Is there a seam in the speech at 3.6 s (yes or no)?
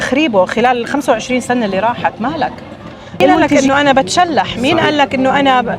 yes